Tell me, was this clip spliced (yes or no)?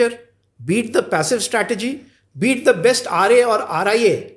no